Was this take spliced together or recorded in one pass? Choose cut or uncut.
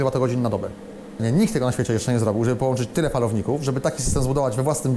cut